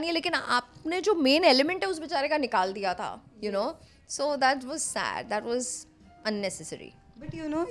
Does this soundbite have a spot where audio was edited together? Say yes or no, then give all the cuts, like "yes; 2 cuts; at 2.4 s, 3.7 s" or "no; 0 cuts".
no; 0 cuts